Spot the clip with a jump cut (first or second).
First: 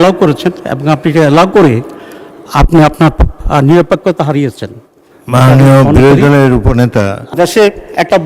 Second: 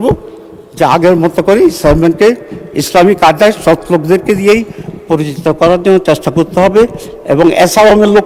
first